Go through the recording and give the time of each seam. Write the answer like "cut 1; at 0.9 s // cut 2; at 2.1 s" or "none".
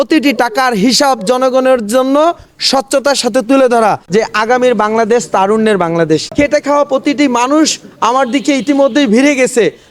cut 1; at 4.0 s // cut 2; at 6.3 s